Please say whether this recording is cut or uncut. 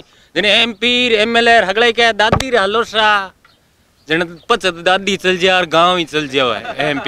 uncut